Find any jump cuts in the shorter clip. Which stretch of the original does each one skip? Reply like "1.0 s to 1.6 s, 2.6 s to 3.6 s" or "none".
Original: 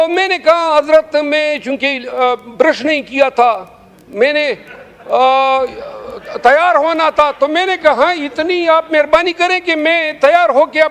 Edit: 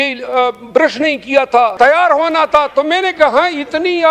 3.6 s to 6.4 s